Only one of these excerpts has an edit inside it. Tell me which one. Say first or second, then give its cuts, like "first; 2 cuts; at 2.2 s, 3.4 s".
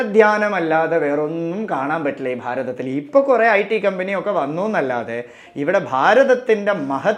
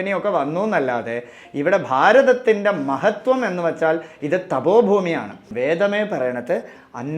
second; 1 cut; at 5.5 s